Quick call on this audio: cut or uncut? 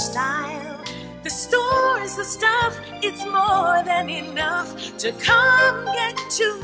uncut